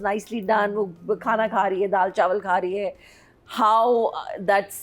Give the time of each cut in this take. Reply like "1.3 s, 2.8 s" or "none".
none